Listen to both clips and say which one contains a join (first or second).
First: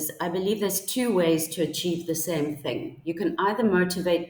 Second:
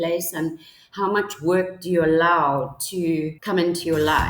second